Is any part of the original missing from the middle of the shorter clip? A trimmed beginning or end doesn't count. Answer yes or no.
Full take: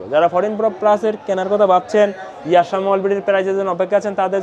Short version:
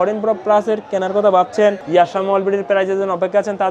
yes